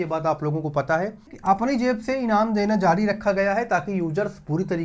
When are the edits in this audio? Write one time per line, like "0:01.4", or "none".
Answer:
0:01.3